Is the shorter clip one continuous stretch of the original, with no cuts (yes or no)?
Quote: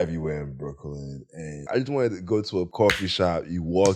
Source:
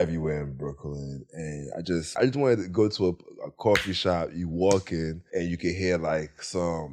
no